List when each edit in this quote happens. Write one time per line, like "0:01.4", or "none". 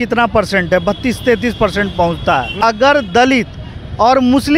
0:02.5